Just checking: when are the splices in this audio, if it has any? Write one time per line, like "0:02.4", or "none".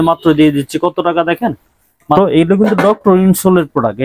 0:02.2